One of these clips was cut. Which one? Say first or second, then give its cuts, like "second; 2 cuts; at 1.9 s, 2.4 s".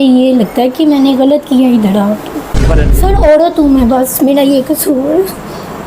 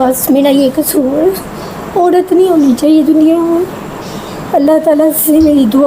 first; 1 cut; at 2.8 s